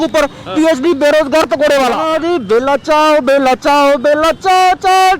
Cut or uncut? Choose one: cut